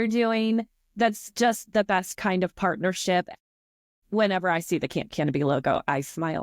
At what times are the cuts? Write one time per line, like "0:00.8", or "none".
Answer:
0:03.3